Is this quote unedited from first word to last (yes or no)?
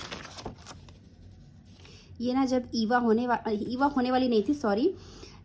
yes